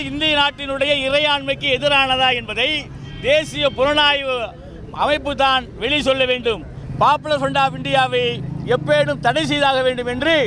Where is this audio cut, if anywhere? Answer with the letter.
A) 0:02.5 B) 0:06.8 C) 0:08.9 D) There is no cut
B